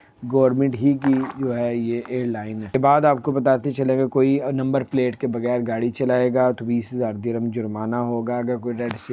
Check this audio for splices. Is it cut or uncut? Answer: cut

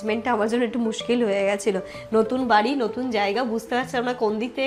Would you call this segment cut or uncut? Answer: uncut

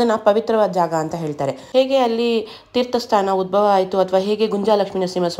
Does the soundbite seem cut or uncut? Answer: cut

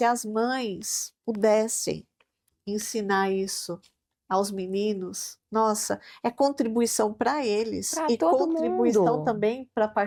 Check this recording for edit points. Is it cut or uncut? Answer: uncut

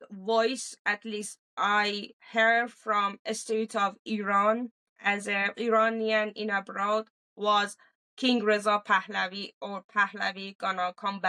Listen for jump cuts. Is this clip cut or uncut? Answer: uncut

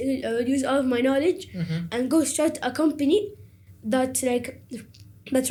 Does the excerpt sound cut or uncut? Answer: uncut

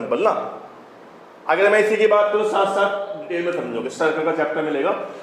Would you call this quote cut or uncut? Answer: cut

